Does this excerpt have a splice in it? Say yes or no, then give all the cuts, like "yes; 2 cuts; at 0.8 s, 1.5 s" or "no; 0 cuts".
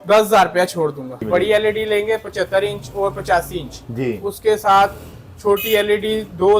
yes; 1 cut; at 1.2 s